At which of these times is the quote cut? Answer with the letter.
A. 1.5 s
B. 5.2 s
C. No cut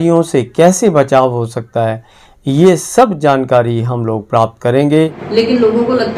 B